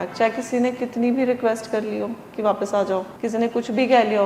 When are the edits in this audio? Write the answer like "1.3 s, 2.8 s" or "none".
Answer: 3.1 s